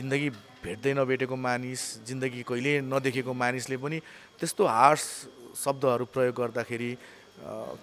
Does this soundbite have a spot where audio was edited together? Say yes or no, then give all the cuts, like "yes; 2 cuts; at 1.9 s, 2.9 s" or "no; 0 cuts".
no; 0 cuts